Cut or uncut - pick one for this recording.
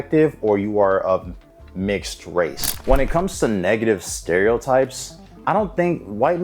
cut